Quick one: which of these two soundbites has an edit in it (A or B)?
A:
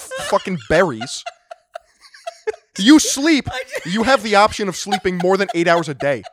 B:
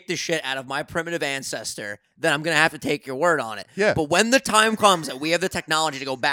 A